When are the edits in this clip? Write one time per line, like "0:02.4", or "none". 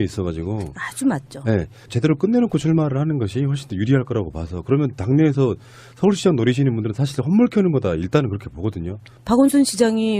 0:07.8

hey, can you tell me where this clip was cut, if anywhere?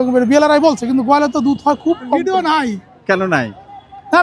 0:02.2

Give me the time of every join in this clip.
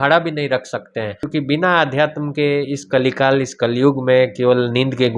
0:01.2

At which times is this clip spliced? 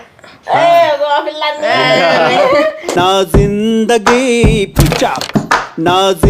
none

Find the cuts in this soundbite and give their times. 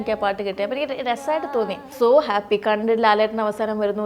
0:01.9

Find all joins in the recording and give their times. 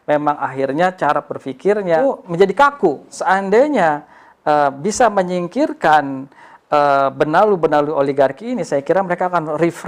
0:02.0
0:03.1

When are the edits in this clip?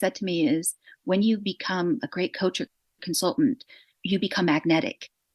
none

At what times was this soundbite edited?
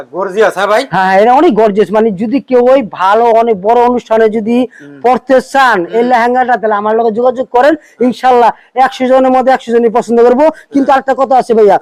none

